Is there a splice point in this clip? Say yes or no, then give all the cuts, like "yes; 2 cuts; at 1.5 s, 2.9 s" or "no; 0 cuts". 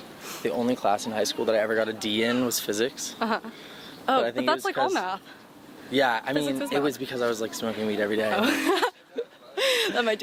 no; 0 cuts